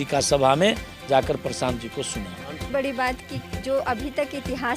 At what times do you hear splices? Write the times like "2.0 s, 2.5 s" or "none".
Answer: 2.7 s